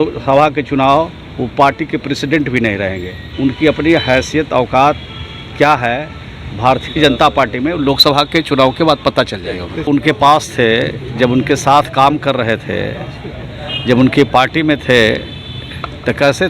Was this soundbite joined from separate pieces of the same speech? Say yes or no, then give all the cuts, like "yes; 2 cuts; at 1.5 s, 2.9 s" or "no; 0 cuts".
yes; 2 cuts; at 3.2 s, 9.9 s